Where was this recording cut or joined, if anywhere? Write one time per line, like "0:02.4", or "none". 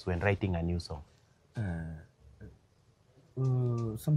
none